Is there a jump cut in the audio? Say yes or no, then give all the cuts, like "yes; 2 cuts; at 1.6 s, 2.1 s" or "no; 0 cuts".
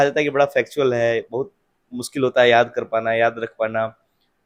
no; 0 cuts